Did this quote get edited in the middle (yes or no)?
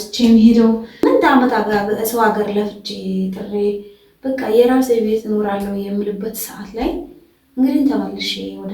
yes